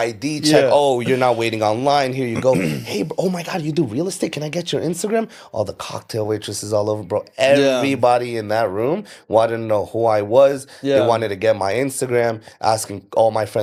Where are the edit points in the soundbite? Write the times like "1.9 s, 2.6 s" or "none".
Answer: none